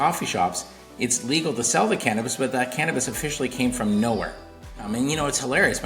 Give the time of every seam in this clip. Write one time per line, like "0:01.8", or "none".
0:04.9